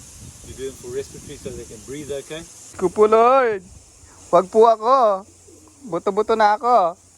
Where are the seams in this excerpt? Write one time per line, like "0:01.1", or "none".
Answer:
0:02.7